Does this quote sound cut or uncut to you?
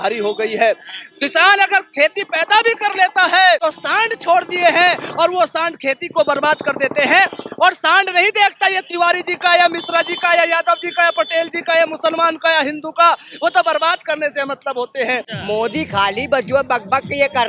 cut